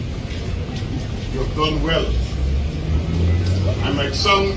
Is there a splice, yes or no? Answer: no